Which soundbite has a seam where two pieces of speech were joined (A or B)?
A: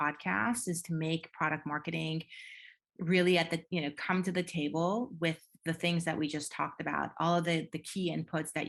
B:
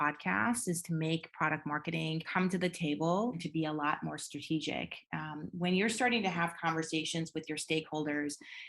B